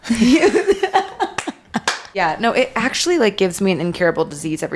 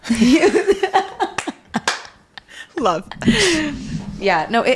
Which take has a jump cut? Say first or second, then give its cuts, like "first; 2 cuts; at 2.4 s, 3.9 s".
first; 1 cut; at 2.0 s